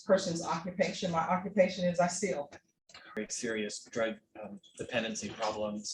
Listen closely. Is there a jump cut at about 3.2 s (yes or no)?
yes